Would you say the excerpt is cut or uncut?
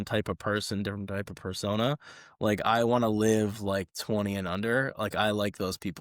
uncut